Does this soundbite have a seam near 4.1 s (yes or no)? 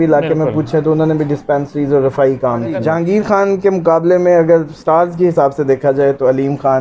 no